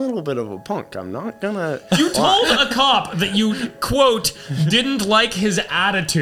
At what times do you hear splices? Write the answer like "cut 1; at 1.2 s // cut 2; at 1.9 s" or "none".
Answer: none